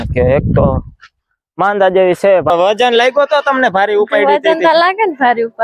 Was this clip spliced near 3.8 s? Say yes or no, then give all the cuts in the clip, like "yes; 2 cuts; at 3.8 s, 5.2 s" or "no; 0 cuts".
no; 1 cut; at 2.5 s